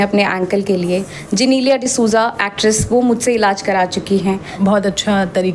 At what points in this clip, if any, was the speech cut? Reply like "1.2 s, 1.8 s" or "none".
4.5 s